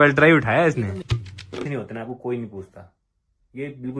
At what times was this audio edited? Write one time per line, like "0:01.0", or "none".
0:01.4